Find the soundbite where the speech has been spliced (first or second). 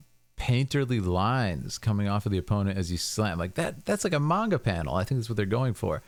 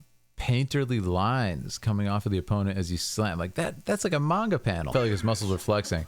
second